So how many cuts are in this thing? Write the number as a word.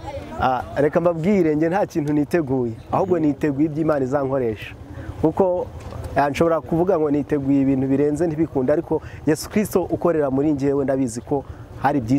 zero